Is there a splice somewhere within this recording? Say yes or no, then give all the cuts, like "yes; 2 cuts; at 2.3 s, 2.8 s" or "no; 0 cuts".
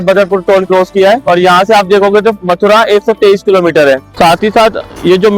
yes; 2 cuts; at 1.2 s, 4.1 s